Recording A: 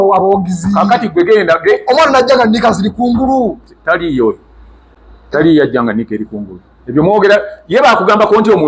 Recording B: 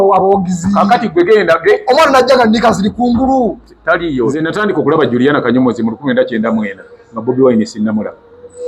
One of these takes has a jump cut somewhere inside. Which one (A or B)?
B